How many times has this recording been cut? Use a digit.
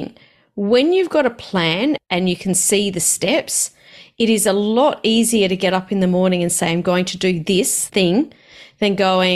2